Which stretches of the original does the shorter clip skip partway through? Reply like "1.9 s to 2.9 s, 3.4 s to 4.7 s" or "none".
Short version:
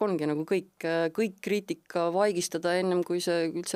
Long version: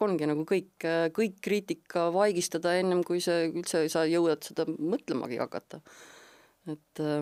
none